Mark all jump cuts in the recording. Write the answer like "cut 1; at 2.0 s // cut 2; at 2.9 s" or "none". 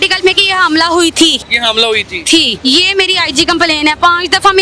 cut 1; at 1.5 s // cut 2; at 2.5 s

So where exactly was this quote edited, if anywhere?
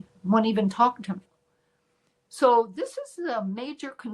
cut 1; at 1.6 s

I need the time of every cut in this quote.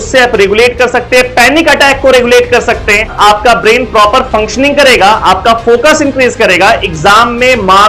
none

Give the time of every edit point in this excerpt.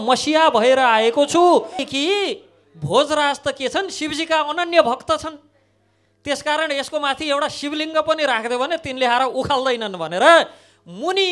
cut 1; at 1.9 s

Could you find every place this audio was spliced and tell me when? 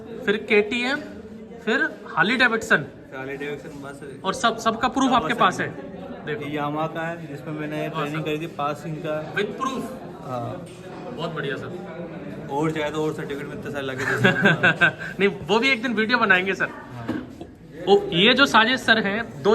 none

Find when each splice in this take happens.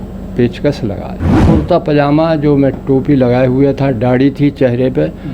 cut 1; at 1.4 s

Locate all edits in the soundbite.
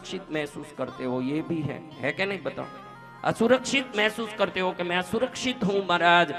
none

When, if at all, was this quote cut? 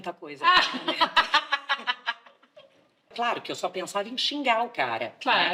cut 1; at 3.1 s

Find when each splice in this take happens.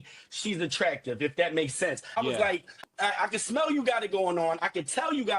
cut 1; at 2.7 s

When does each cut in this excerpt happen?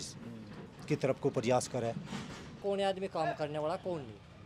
cut 1; at 2.6 s

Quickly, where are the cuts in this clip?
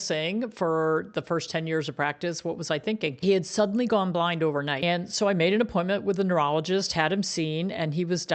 cut 1; at 3.2 s // cut 2; at 4.8 s

